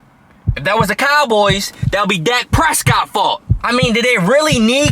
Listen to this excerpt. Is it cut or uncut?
cut